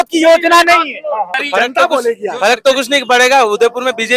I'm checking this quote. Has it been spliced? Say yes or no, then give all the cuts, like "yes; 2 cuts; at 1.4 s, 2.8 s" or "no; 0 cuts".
yes; 1 cut; at 1.4 s